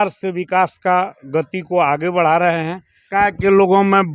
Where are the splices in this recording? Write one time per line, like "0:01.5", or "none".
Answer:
0:03.0